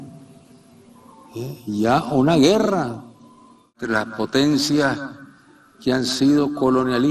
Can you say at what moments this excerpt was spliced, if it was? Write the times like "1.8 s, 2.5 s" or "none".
3.8 s